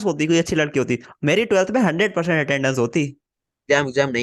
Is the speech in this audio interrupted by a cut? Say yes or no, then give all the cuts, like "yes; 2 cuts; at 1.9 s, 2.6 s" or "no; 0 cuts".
yes; 1 cut; at 3.2 s